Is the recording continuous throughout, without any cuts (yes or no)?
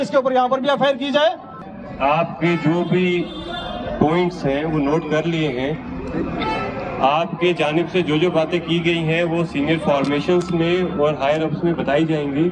no